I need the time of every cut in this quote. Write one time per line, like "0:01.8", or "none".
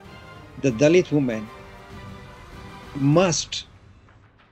0:01.5
0:02.8
0:03.6